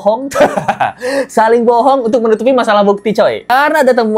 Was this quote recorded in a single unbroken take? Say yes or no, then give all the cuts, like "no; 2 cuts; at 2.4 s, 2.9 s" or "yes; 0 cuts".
yes; 0 cuts